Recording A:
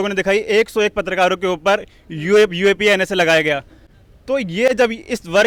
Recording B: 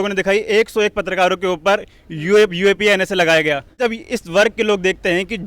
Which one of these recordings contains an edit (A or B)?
B